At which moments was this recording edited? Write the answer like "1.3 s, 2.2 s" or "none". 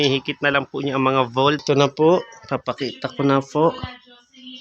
1.6 s